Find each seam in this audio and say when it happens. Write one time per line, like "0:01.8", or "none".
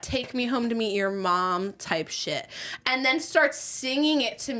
none